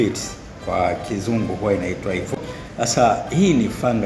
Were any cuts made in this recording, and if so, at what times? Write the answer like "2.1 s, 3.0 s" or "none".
2.3 s